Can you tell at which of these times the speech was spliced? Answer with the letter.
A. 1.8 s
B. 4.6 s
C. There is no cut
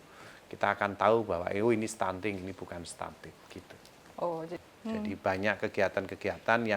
B